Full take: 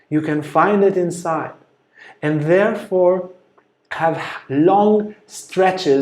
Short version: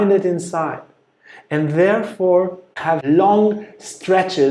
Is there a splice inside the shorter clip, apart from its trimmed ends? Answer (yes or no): yes